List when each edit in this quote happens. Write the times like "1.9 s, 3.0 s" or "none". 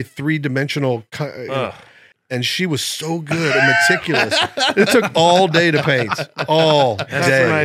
2.2 s